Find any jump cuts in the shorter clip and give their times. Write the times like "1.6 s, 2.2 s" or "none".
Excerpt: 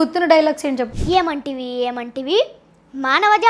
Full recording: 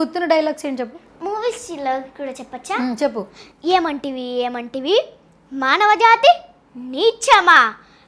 1.0 s